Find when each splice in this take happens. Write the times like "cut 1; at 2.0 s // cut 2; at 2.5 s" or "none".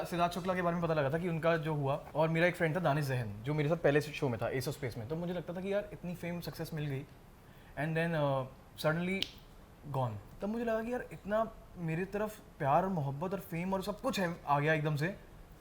cut 1; at 2.1 s // cut 2; at 8.6 s // cut 3; at 10.2 s